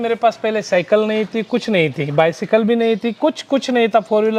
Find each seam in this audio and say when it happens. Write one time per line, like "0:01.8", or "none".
none